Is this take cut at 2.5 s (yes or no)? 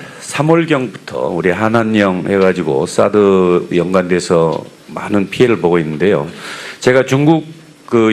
no